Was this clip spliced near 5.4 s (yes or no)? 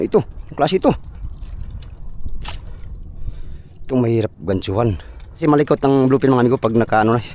yes